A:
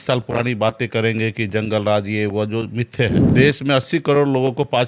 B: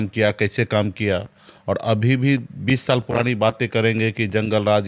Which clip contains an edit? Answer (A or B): A